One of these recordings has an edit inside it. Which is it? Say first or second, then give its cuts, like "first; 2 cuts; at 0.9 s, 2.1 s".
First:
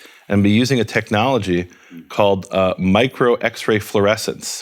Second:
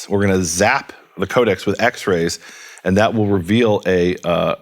second; 1 cut; at 1.2 s